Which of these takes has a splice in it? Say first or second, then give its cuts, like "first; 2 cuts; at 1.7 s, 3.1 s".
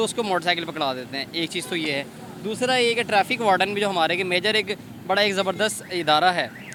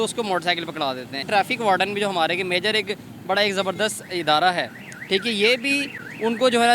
second; 1 cut; at 1.3 s